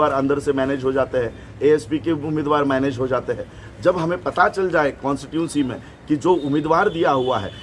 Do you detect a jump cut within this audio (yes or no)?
no